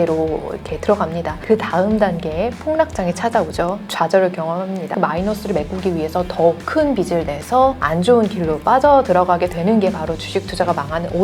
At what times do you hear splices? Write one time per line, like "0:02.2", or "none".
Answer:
0:01.3
0:04.9